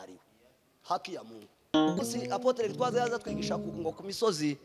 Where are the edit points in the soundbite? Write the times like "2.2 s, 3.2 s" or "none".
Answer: 2.0 s